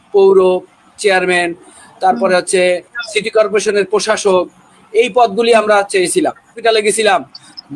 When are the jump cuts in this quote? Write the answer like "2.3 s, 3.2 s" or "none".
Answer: 6.5 s